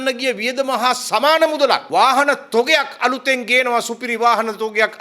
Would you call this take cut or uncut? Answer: cut